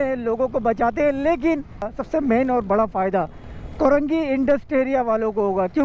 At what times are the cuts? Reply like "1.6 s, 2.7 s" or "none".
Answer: 1.9 s